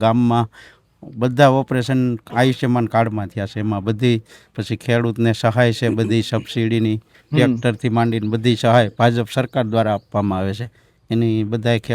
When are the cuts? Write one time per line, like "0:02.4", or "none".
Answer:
none